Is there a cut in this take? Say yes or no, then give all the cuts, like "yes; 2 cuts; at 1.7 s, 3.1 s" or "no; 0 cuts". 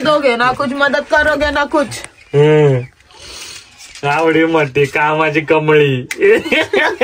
no; 0 cuts